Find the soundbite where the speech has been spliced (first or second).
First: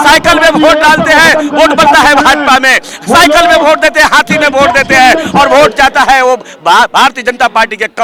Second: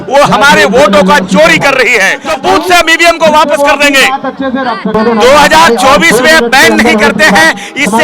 second